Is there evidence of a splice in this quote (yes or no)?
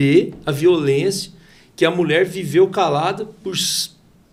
no